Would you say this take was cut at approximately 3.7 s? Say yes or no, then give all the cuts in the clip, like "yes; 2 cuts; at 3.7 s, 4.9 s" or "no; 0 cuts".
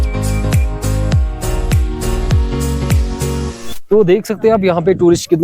yes; 1 cut; at 3.7 s